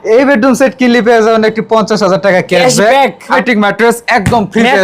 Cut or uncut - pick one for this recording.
cut